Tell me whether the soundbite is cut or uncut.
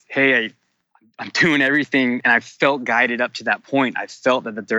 cut